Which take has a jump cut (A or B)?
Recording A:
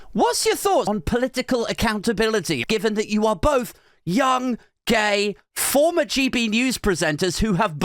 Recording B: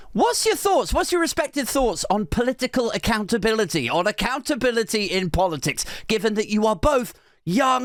A